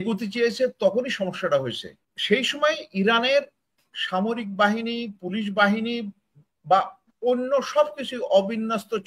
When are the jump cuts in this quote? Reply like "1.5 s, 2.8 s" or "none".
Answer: 2.1 s